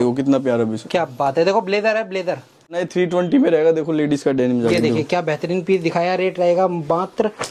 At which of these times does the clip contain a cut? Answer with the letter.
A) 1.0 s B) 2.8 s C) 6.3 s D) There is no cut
B